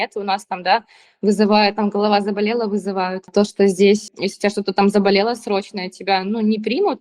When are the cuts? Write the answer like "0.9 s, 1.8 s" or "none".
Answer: 3.3 s, 4.1 s